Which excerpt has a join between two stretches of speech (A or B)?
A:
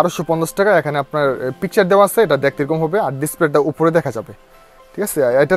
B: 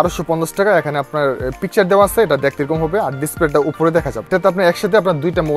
B